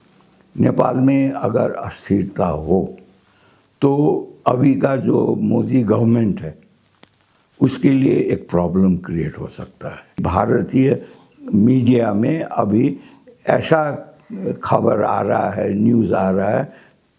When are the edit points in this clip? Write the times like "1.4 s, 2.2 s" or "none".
10.2 s